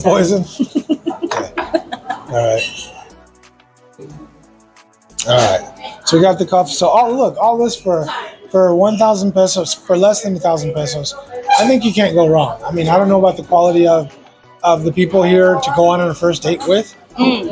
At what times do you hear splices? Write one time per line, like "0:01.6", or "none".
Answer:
none